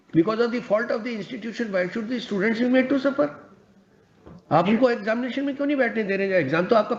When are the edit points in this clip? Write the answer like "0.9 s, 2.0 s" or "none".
none